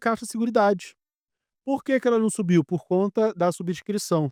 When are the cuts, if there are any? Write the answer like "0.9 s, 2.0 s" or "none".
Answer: none